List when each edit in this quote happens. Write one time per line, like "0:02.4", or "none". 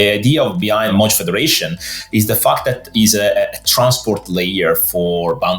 0:00.9